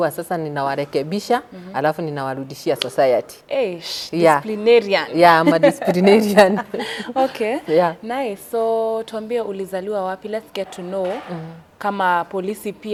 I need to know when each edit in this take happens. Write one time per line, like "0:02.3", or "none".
none